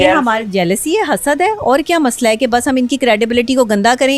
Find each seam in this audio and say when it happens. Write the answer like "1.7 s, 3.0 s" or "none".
none